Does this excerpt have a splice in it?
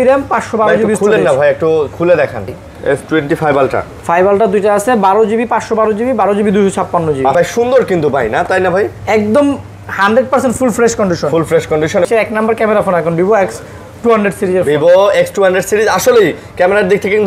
yes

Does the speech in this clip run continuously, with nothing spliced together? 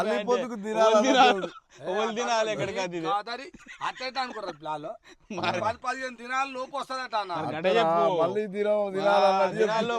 yes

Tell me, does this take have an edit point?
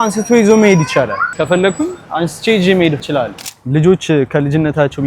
yes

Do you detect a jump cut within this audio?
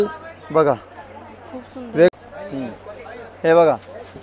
yes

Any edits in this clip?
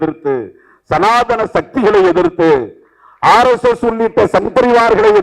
no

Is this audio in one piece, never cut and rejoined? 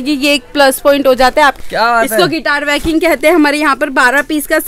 no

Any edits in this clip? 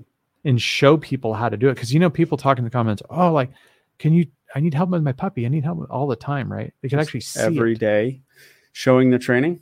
no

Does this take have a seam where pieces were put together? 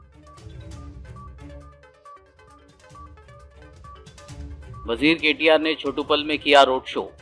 yes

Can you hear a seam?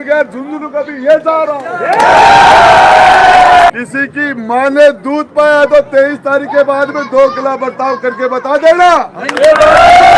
yes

